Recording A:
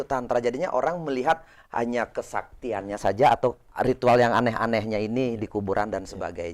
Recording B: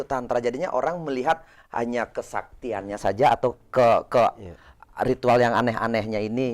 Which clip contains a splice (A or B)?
A